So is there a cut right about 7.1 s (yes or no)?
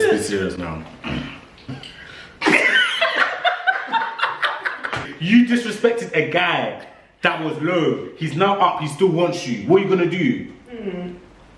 no